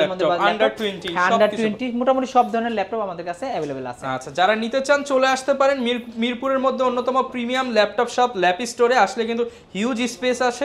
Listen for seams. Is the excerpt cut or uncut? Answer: uncut